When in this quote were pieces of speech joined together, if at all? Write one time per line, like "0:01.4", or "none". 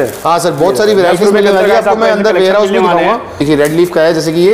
0:03.4